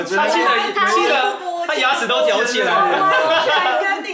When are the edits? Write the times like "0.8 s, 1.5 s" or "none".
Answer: none